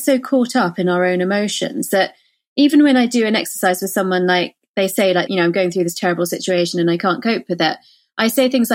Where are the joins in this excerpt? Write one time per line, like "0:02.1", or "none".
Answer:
0:05.3